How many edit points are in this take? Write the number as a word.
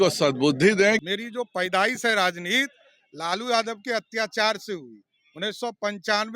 one